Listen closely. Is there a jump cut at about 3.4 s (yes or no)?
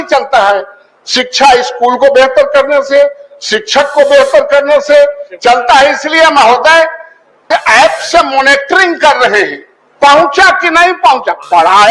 no